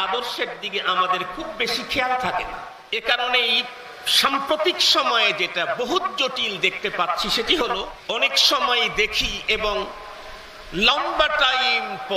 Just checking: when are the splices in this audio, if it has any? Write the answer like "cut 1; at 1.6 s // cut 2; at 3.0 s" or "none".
cut 1; at 2.7 s // cut 2; at 7.9 s